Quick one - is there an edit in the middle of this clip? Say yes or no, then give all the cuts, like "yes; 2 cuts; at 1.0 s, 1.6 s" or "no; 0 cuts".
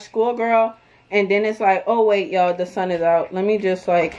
no; 0 cuts